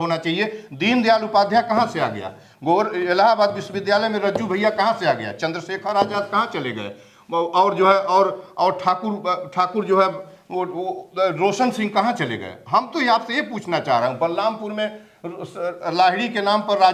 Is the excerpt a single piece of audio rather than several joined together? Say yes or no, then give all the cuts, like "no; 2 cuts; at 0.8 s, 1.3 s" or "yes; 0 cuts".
yes; 0 cuts